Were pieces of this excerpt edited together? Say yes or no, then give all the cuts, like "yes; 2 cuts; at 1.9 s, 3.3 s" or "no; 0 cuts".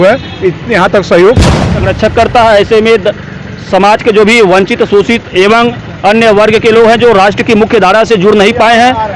yes; 1 cut; at 1.8 s